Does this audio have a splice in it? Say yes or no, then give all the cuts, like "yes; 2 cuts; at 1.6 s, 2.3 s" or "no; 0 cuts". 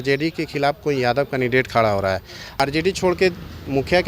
yes; 1 cut; at 2.6 s